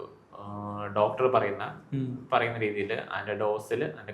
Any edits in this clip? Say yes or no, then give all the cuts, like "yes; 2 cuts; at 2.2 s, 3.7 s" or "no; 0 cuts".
no; 0 cuts